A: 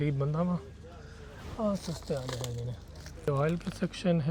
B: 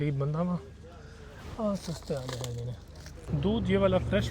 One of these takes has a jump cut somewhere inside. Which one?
B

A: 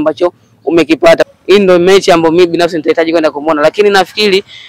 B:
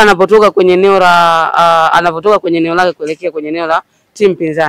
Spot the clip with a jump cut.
A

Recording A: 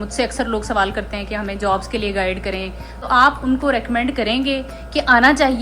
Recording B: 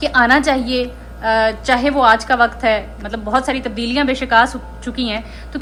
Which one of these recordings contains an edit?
A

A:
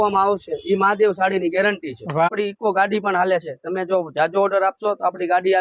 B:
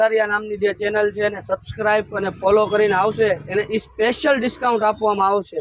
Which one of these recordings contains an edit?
A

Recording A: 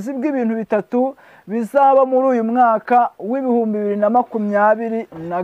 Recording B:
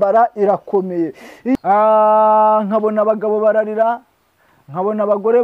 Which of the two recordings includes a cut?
B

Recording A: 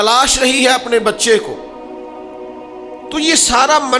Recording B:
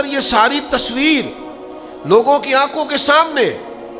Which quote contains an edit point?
A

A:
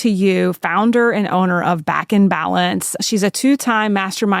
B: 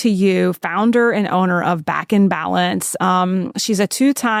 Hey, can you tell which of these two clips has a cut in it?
A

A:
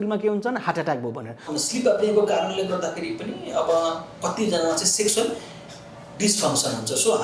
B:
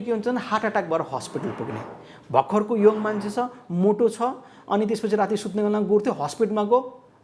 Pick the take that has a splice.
A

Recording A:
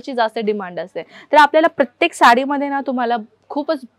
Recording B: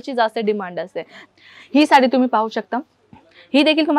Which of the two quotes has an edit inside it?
B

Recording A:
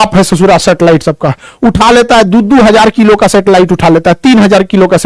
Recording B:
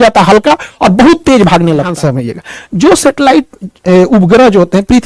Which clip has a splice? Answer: B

